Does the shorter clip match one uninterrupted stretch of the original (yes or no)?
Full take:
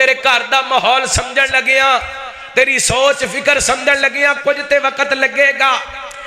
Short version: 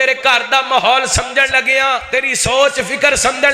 no